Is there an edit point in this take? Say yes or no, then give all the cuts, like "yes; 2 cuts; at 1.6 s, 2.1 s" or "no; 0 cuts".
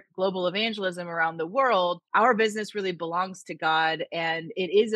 yes; 1 cut; at 2.0 s